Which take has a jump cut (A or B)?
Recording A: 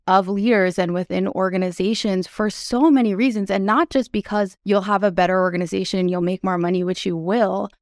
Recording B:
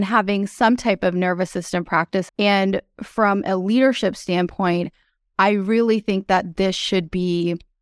B